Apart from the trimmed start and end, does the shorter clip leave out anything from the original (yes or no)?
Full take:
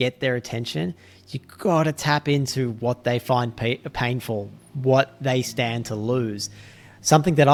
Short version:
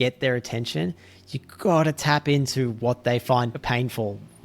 yes